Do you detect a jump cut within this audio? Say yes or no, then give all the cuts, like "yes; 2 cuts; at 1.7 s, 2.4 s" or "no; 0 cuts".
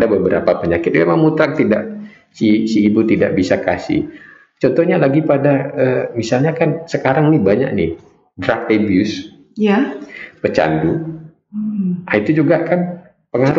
no; 0 cuts